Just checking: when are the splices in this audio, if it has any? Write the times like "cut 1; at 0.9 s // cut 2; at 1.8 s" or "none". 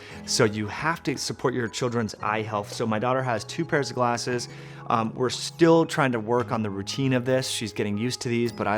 none